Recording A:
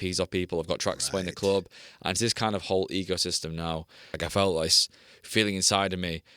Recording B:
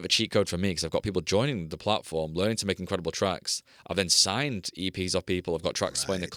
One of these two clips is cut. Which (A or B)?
A